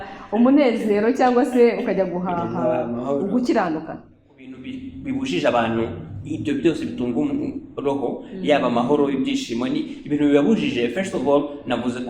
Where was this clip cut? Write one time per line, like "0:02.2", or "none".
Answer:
0:04.5